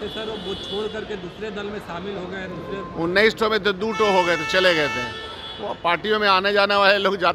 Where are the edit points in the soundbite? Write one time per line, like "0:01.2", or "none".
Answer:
none